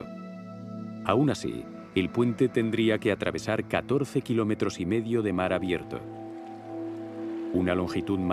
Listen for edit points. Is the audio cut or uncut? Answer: cut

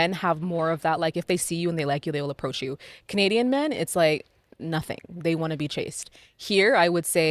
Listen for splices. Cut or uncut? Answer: uncut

